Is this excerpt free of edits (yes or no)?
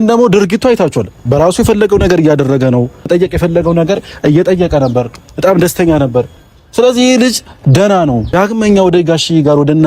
no